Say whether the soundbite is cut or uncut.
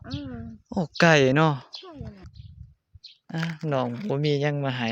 cut